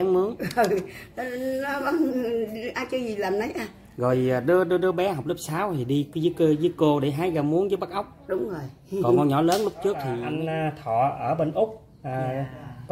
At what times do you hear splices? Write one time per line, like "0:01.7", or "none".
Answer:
0:10.2